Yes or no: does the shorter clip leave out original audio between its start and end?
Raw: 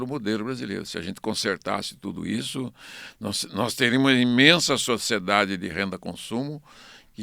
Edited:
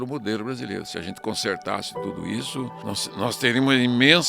yes